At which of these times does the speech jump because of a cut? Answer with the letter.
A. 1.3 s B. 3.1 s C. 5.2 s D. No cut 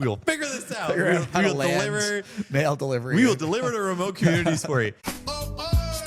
C